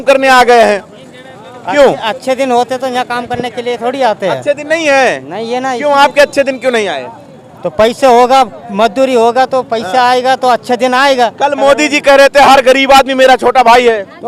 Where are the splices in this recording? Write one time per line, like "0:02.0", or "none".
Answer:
none